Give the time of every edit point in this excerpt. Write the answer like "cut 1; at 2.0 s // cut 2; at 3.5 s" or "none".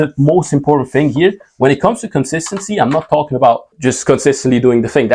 cut 1; at 3.7 s

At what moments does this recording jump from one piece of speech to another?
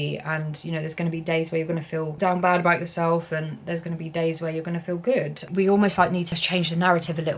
cut 1; at 2.1 s // cut 2; at 6.3 s

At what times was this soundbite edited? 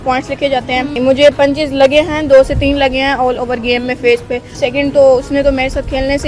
cut 1; at 0.9 s // cut 2; at 4.6 s

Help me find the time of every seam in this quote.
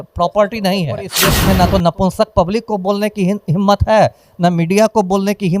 cut 1; at 1.2 s

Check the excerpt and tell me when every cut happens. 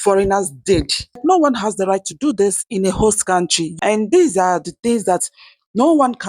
cut 1; at 1.2 s // cut 2; at 3.6 s

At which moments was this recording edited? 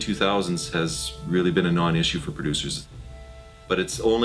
cut 1; at 3.0 s

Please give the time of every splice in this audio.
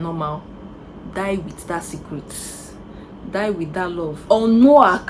cut 1; at 4.2 s

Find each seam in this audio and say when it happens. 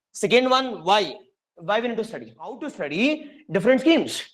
cut 1; at 2.7 s

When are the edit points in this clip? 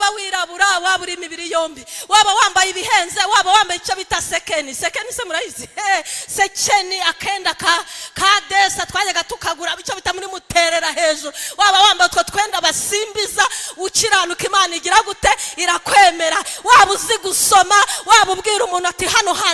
none

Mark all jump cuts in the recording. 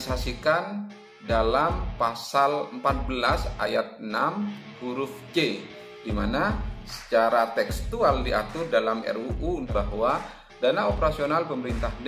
cut 1; at 9.7 s

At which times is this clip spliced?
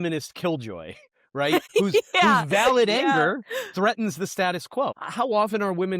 cut 1; at 1.7 s // cut 2; at 5.0 s

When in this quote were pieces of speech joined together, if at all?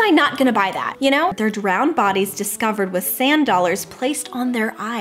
cut 1; at 1.1 s

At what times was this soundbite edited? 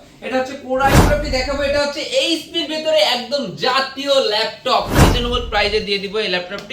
cut 1; at 1.0 s // cut 2; at 5.0 s

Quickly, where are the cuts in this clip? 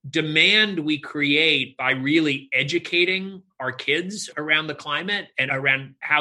cut 1; at 4.3 s // cut 2; at 5.5 s

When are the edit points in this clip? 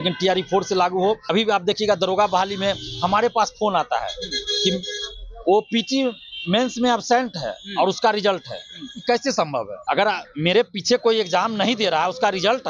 cut 1; at 1.2 s // cut 2; at 9.8 s

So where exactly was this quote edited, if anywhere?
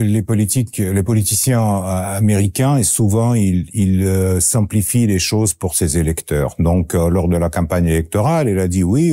none

